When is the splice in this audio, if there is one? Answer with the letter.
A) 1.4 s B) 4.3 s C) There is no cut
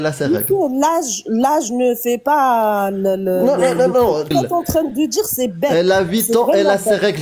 B